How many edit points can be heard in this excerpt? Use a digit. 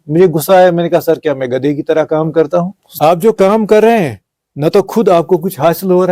1